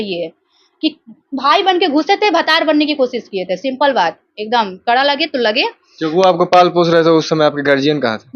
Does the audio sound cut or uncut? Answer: uncut